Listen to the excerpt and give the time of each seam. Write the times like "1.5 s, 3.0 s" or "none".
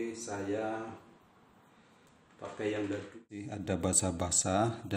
3.6 s